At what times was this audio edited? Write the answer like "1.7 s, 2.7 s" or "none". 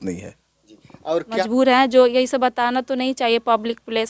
1.3 s